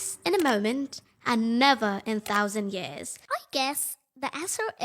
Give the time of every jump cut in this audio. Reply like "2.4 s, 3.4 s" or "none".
3.1 s